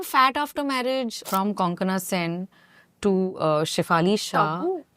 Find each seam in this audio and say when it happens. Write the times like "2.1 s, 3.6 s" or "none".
1.2 s